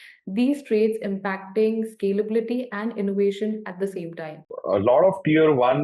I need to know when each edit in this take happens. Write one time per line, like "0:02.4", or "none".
0:04.5